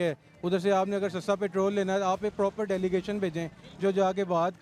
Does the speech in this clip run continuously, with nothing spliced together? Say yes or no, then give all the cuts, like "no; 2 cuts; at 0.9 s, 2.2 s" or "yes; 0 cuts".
yes; 0 cuts